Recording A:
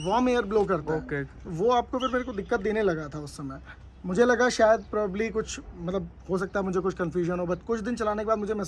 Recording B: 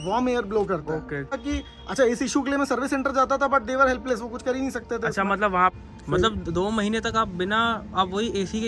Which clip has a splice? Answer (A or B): B